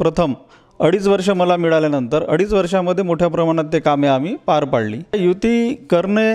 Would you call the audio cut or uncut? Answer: cut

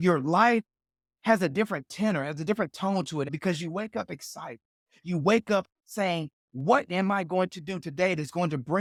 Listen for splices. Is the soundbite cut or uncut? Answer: uncut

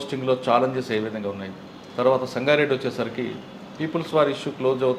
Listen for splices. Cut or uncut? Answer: uncut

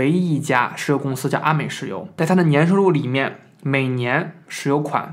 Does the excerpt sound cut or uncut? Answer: cut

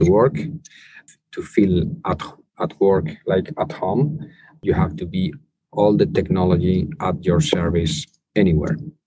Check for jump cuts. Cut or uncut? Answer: cut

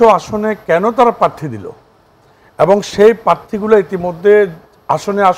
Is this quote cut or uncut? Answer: uncut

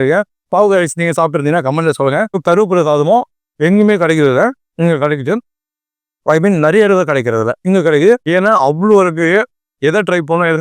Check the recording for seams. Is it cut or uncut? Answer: cut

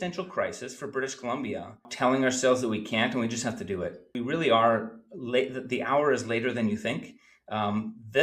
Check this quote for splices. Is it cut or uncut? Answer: cut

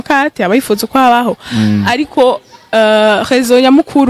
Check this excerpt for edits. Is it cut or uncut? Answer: uncut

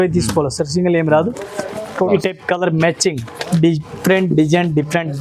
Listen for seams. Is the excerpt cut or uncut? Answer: cut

